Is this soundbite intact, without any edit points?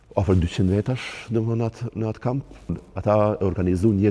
no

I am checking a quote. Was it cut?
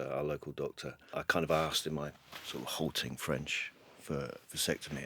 yes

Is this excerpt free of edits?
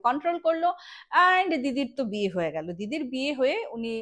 yes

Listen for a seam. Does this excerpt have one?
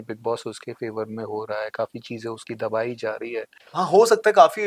yes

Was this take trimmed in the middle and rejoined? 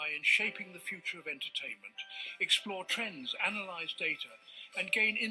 no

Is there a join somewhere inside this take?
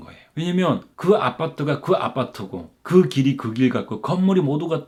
no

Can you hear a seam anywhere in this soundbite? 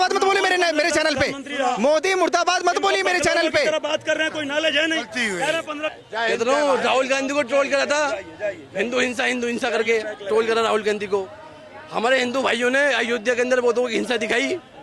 yes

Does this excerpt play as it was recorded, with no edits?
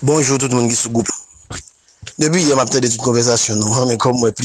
no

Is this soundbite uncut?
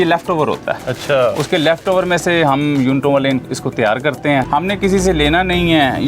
no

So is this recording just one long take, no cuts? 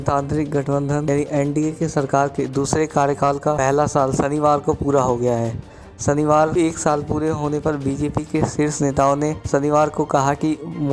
no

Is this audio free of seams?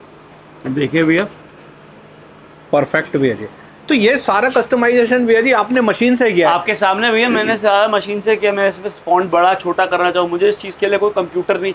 yes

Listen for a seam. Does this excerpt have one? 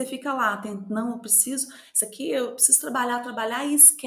no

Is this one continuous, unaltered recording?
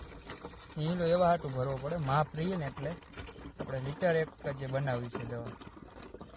yes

